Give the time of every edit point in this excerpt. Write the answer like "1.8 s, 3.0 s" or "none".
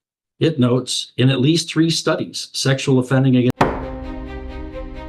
3.5 s

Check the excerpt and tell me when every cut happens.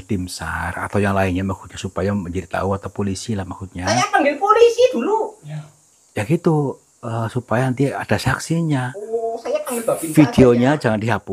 none

